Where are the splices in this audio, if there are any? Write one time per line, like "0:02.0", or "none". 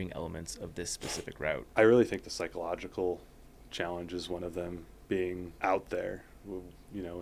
0:01.7
0:05.5